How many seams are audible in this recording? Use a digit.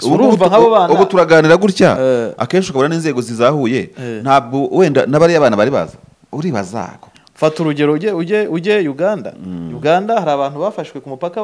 1